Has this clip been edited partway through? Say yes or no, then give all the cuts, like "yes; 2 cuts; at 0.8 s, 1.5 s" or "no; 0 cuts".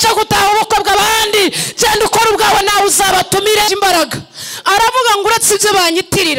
yes; 1 cut; at 3.7 s